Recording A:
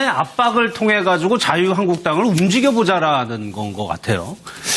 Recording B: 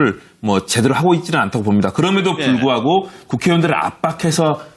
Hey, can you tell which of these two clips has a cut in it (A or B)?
B